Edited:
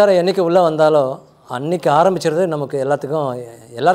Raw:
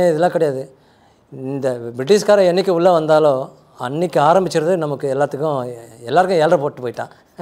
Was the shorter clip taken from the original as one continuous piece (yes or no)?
yes